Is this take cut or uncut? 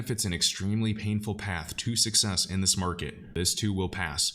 cut